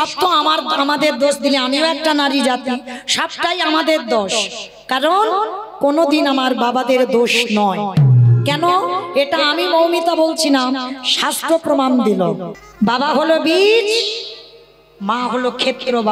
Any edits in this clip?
yes; 1 cut; at 12.5 s

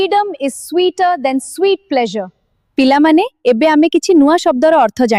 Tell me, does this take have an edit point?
yes; 1 cut; at 2.5 s

